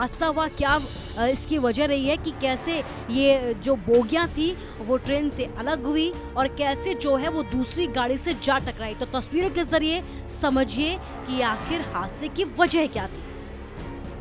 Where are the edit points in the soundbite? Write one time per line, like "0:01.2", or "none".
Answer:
0:13.1